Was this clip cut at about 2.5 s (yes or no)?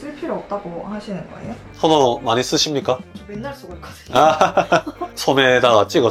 no